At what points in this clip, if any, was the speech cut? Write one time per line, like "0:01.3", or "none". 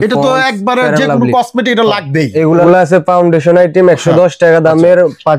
0:02.6